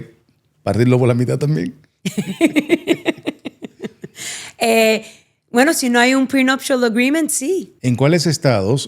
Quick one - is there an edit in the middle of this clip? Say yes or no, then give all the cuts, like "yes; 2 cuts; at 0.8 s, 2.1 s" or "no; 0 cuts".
yes; 1 cut; at 7.7 s